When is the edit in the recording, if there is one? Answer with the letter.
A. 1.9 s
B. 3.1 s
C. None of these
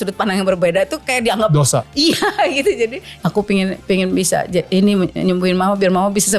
B